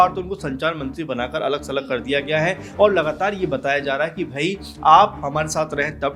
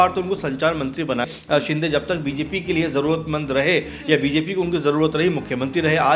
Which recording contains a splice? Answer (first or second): second